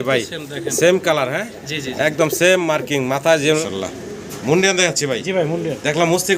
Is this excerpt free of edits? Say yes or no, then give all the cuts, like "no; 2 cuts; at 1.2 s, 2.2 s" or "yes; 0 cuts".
no; 1 cut; at 3.6 s